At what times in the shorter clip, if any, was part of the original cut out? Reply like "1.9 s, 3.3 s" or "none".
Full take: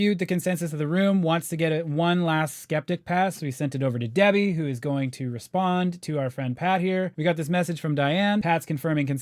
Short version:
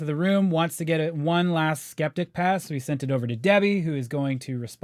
none